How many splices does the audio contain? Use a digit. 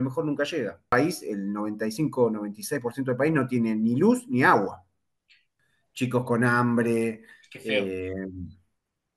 2